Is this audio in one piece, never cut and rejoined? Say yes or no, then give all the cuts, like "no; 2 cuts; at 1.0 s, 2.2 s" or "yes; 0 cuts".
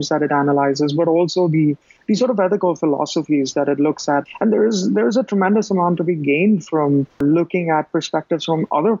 no; 2 cuts; at 1.9 s, 4.2 s